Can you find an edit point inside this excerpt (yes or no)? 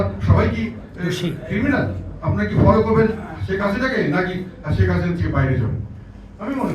yes